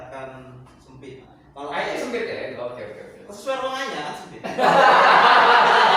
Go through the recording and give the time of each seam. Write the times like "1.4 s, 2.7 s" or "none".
1.4 s, 2.5 s